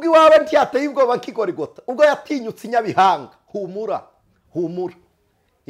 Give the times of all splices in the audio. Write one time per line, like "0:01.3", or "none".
none